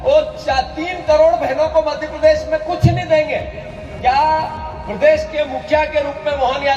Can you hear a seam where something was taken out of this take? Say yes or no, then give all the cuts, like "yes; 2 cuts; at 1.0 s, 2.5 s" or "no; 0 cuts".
no; 0 cuts